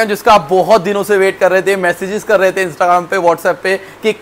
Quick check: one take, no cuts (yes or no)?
yes